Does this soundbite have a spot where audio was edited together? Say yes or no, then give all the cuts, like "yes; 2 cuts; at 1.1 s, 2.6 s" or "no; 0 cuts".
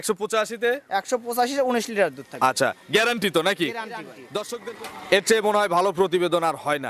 yes; 1 cut; at 4.6 s